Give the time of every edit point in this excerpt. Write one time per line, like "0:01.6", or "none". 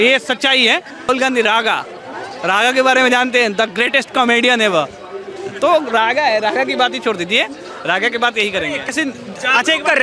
0:01.1
0:08.9